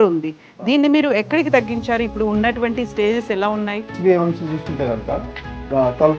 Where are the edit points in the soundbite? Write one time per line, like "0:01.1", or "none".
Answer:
0:03.9